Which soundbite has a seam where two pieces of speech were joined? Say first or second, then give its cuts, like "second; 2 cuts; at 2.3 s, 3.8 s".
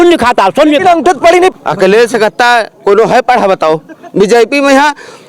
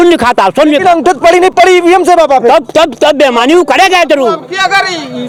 first; 1 cut; at 1.5 s